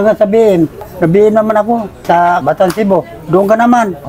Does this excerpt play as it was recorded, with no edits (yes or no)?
yes